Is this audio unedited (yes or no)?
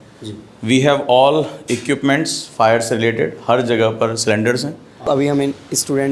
no